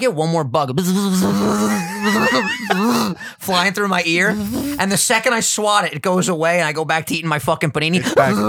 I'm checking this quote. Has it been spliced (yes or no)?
no